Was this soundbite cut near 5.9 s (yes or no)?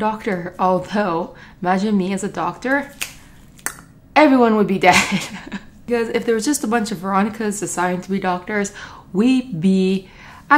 yes